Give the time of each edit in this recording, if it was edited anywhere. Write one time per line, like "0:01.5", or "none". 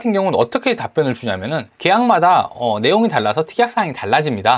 0:01.7